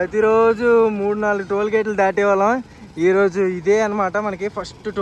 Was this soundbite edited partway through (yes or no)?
no